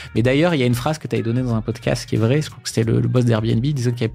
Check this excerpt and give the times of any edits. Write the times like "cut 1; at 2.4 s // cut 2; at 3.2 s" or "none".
cut 1; at 2.0 s